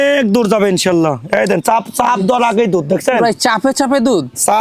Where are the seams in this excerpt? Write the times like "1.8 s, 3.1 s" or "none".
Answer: none